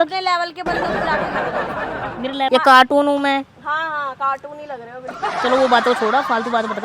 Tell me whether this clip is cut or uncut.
cut